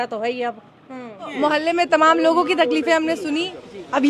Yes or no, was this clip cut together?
yes